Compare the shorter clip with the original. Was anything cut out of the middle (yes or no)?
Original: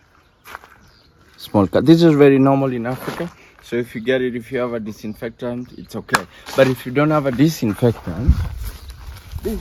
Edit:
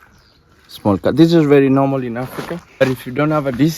yes